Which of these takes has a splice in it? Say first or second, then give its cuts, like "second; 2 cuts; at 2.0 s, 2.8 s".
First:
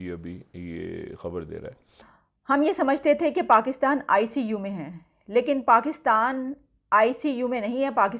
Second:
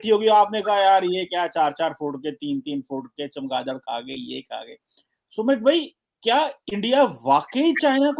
first; 1 cut; at 2.2 s